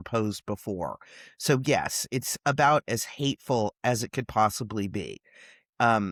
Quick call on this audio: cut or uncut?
uncut